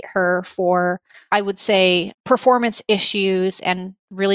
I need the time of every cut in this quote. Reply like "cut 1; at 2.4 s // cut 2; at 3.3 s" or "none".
cut 1; at 2.1 s

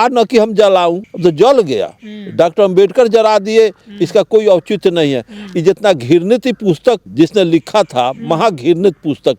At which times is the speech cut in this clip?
cut 1; at 1.1 s // cut 2; at 7.1 s

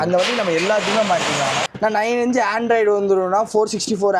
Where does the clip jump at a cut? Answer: cut 1; at 1.7 s

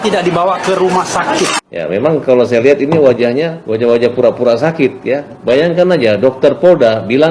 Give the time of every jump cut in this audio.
cut 1; at 1.5 s // cut 2; at 3.6 s // cut 3; at 5.3 s

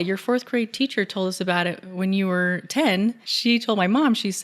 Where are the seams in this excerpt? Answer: cut 1; at 3.3 s

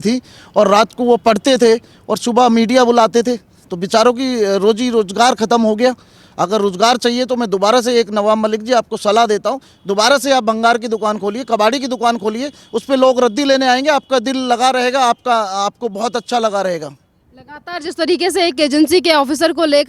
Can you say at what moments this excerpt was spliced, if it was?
none

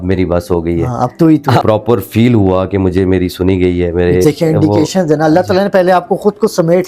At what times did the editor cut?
cut 1; at 1.6 s // cut 2; at 4.2 s

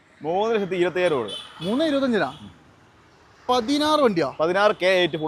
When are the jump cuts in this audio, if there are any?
none

